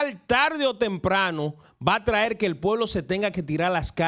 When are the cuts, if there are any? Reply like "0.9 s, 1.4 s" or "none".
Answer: none